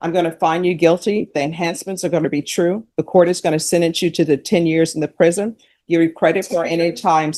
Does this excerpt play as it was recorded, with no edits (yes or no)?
yes